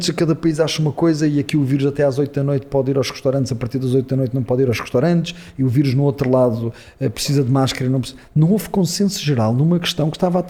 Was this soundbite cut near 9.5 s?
no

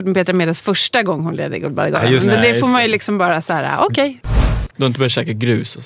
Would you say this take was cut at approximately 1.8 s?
no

